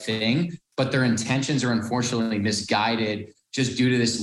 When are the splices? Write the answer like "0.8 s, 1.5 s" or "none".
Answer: none